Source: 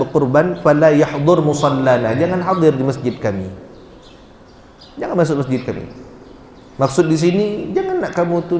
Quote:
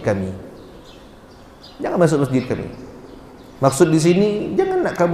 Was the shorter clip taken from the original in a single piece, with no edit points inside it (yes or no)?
yes